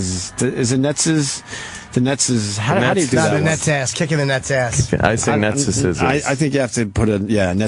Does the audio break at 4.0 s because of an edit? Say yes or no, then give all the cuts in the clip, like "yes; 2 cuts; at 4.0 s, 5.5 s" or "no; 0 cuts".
yes; 1 cut; at 4.0 s